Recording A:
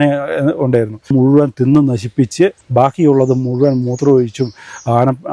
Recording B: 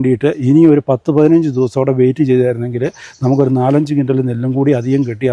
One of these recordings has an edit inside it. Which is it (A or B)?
A